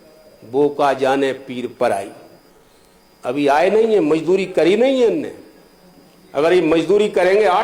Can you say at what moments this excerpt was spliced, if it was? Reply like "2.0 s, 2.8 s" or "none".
none